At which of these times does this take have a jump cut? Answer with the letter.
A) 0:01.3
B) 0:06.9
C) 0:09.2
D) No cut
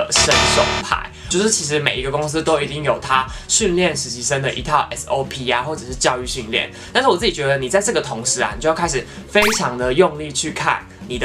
A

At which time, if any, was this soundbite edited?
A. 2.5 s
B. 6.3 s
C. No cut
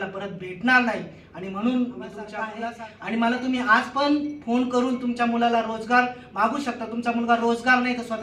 A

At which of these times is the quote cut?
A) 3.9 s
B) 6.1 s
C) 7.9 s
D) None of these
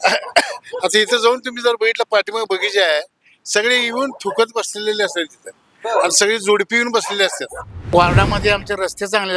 C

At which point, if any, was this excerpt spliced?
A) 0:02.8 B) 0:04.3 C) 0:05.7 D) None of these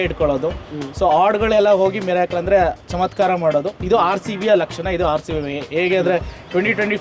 D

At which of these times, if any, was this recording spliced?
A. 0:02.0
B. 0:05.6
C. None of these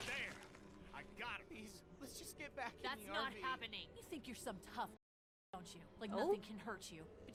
C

